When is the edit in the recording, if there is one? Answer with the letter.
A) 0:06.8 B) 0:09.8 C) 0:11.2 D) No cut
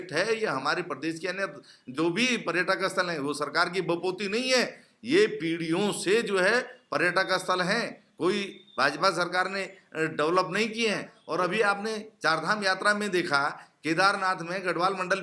C